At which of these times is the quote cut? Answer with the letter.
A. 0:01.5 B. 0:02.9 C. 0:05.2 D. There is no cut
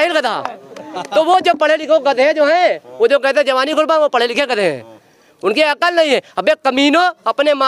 D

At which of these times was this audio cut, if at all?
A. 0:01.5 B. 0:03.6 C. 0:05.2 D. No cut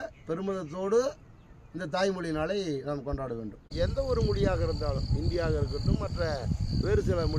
B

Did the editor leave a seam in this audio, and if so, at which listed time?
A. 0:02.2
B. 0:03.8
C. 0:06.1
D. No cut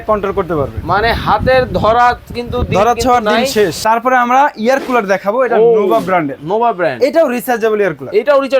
B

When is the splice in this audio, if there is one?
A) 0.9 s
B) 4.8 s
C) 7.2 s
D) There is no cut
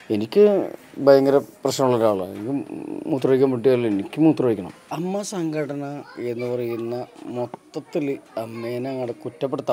B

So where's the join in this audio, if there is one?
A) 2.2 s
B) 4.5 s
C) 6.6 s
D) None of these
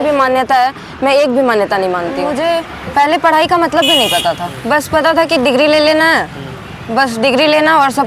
A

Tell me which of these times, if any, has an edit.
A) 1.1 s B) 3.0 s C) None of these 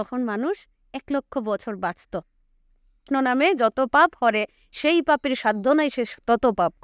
B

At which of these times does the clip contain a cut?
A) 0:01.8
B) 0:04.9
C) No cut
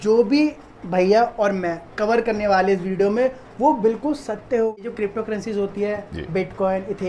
B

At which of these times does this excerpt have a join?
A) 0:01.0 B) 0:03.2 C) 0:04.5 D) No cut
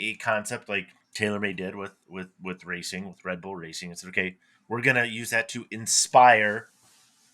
A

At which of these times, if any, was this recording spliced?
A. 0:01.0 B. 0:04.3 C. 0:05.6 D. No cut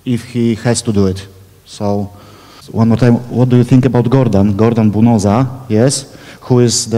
B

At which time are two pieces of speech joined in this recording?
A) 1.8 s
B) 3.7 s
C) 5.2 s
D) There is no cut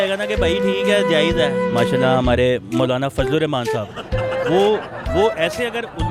A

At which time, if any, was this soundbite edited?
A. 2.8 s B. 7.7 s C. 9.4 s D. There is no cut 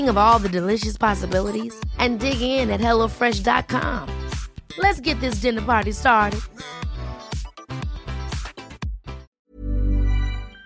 C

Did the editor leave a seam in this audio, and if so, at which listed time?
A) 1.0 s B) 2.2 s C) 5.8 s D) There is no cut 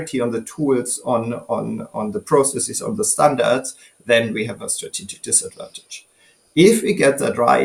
D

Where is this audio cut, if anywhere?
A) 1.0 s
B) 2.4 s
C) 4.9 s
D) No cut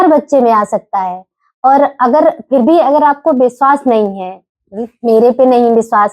D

